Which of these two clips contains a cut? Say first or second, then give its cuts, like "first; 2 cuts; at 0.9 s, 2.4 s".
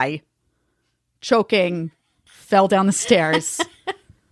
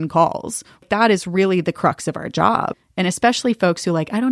second; 1 cut; at 2.7 s